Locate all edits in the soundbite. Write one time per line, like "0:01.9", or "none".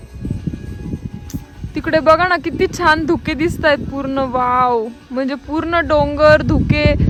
none